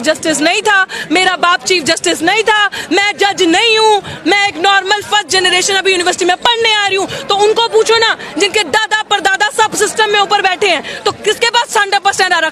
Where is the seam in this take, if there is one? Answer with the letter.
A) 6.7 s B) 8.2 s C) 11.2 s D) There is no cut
D